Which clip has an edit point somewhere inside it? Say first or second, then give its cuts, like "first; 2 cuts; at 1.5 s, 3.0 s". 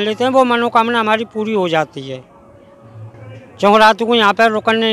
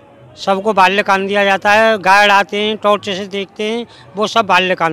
first; 1 cut; at 3.1 s